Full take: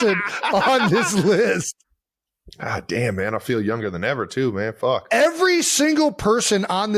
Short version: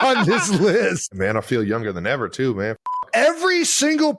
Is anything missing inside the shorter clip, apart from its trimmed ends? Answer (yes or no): yes